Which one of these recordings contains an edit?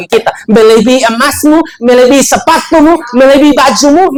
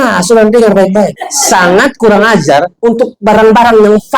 second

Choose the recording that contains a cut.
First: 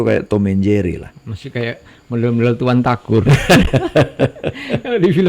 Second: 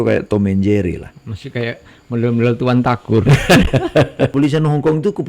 second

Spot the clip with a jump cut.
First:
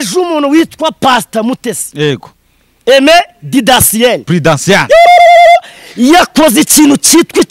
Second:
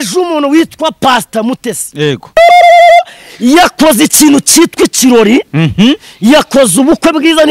second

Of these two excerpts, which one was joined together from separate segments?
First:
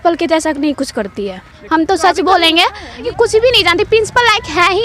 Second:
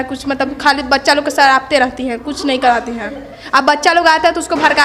first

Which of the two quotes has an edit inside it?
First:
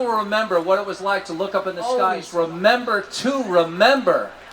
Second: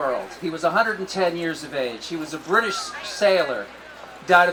first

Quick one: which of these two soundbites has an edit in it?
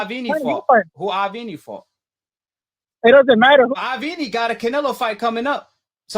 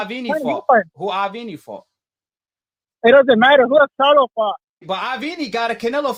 first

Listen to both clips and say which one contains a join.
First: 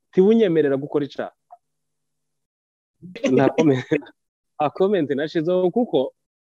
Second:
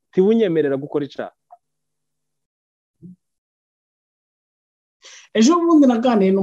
first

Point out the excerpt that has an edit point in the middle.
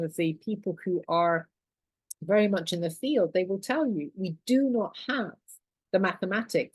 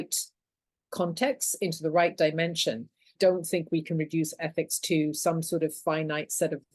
second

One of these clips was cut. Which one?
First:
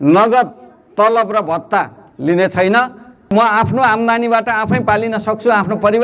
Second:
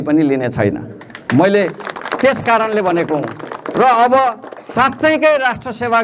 first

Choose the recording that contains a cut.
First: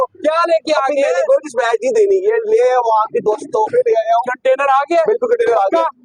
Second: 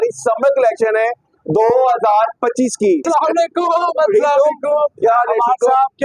second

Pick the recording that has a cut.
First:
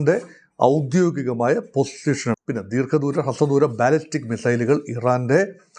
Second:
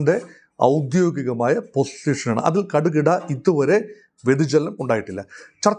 first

